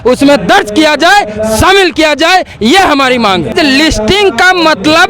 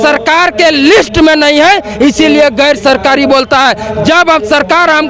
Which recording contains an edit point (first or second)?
first